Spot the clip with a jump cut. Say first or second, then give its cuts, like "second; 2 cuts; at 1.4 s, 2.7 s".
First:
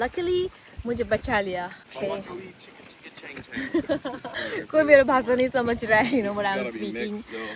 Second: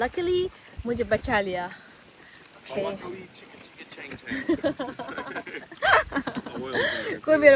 first; 2 cuts; at 1.8 s, 4.4 s